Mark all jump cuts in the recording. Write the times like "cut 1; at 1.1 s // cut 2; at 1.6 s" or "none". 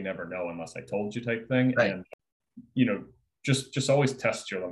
cut 1; at 2.1 s